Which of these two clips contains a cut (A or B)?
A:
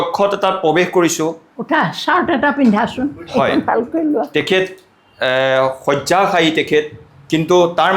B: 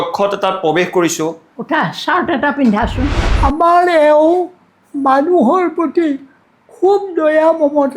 B